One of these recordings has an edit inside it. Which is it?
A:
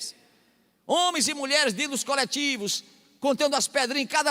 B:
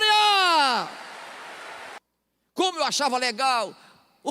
B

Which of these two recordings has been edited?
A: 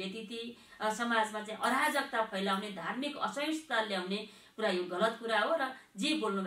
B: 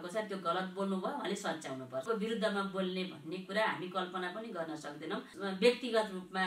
B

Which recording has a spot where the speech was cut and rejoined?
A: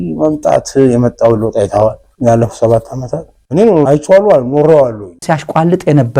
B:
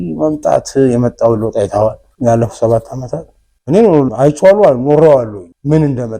A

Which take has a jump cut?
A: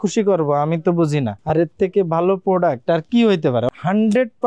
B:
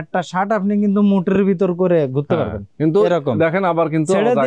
A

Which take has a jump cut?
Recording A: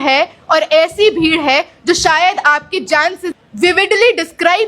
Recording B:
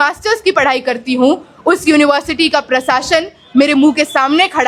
A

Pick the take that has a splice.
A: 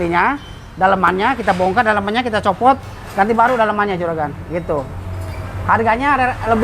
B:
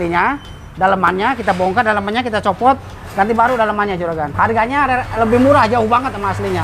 B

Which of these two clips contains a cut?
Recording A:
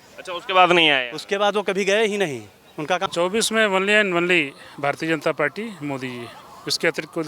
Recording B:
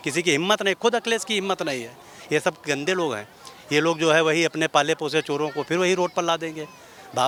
A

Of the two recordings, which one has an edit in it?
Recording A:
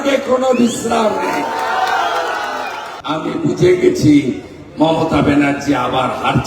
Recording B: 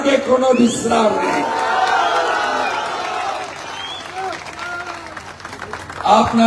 A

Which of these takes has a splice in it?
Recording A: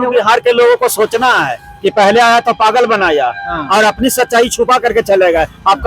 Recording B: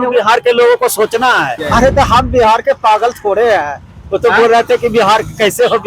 B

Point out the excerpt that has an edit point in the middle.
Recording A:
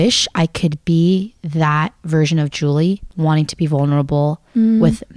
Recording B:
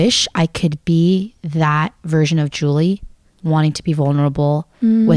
A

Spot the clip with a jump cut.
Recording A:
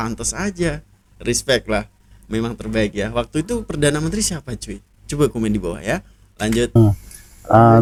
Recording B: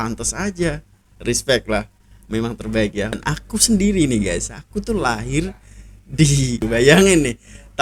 B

